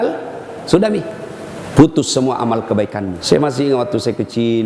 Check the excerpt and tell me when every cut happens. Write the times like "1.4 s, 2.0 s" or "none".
3.1 s